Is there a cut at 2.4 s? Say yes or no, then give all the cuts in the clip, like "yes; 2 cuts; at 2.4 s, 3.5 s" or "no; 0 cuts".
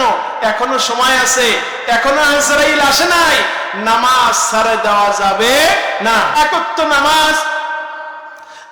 no; 1 cut; at 6.4 s